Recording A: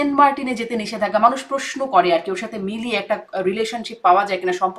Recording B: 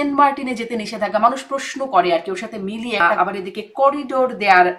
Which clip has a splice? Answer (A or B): B